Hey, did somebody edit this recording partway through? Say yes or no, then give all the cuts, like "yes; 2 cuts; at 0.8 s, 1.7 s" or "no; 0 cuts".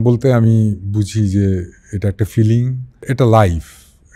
yes; 1 cut; at 3.0 s